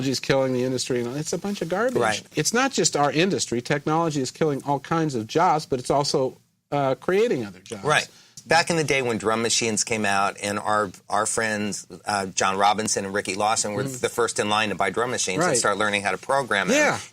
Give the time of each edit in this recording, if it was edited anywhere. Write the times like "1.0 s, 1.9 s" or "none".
2.3 s, 8.4 s